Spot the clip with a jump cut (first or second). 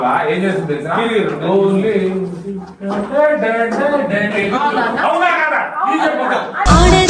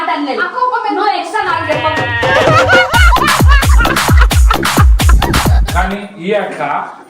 second